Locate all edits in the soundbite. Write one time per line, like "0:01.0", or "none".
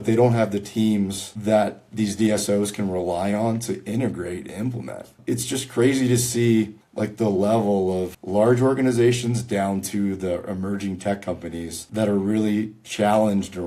0:05.1